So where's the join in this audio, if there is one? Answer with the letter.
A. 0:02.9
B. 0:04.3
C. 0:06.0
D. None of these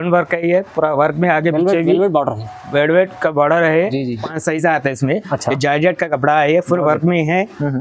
B